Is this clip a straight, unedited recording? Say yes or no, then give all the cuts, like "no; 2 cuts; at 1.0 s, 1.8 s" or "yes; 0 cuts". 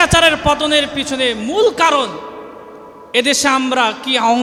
yes; 0 cuts